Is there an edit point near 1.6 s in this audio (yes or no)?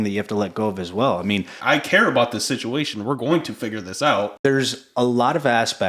yes